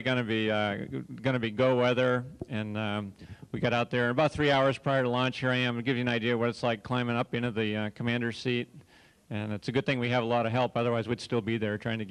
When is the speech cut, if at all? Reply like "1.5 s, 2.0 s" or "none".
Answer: 7.8 s

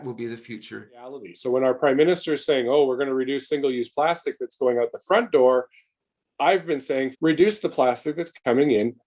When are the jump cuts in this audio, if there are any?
1.3 s, 7.1 s

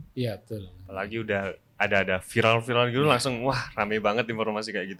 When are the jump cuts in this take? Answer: none

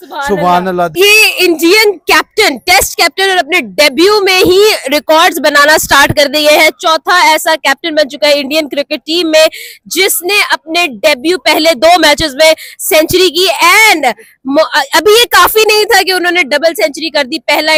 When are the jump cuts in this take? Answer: none

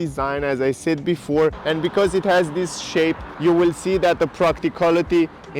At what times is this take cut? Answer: 1.6 s, 3.3 s

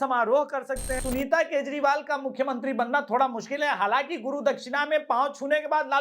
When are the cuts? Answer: 1.0 s

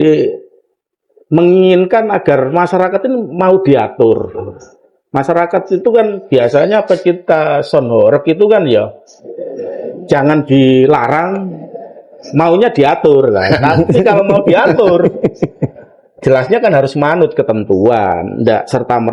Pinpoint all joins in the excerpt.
none

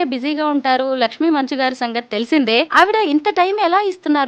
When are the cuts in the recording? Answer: 2.7 s

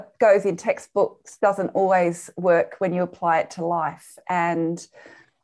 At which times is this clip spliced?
none

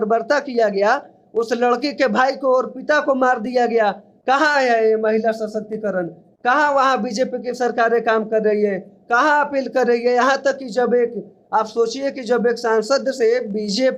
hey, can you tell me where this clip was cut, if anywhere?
none

